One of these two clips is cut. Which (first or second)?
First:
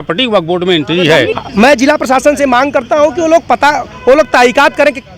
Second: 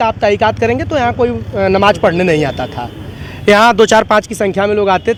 first